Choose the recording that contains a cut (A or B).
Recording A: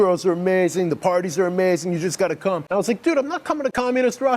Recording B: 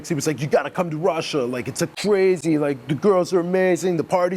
A